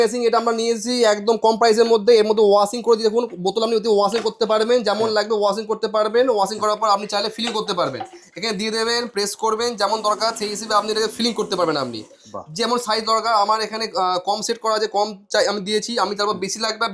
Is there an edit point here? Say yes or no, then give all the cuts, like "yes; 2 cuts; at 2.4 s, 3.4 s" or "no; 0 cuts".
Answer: no; 0 cuts